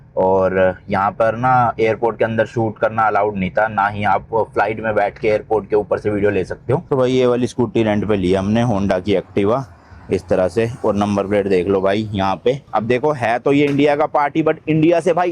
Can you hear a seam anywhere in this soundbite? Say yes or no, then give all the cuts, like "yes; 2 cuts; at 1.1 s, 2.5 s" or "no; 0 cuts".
yes; 2 cuts; at 6.8 s, 12.7 s